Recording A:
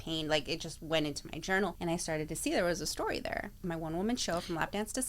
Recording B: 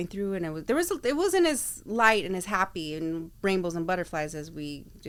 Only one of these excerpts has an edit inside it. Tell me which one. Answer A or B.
A